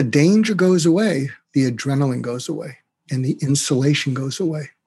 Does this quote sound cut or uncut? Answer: cut